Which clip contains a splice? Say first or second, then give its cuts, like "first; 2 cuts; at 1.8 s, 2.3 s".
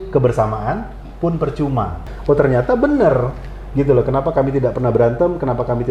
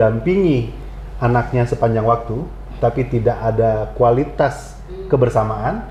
first; 1 cut; at 2.1 s